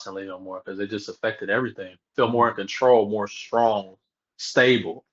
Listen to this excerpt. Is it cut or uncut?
cut